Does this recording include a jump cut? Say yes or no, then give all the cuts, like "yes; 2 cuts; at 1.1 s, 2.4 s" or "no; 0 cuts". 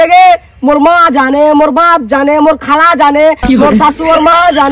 no; 0 cuts